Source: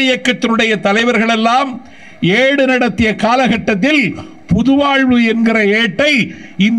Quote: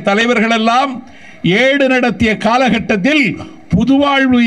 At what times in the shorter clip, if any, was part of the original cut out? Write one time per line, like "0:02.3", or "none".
none